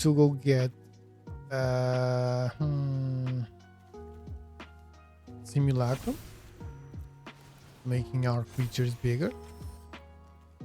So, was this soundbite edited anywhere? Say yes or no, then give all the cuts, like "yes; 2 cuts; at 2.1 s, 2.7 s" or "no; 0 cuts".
yes; 2 cuts; at 3.4 s, 5.0 s